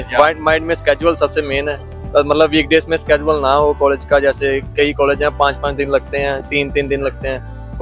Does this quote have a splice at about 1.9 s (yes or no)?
no